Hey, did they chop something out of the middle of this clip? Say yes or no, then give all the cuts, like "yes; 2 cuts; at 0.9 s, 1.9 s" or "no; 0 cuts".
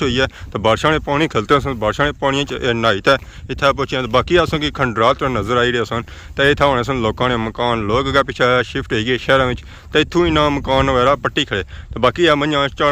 no; 0 cuts